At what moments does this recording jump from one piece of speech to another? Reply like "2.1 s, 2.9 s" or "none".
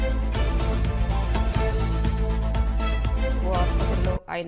1.0 s